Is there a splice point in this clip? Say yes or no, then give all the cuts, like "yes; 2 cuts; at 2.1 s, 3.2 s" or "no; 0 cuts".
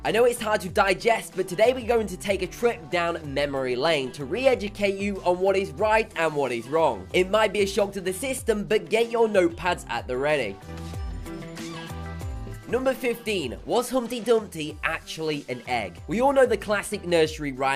no; 0 cuts